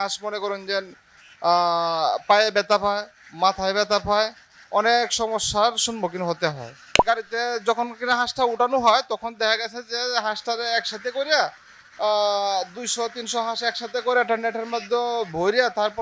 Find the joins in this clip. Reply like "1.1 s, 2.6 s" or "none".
7.0 s